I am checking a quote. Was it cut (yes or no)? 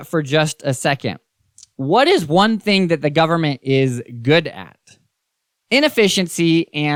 no